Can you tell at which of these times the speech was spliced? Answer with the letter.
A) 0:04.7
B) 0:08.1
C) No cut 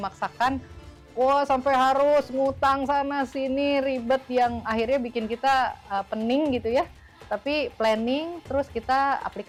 C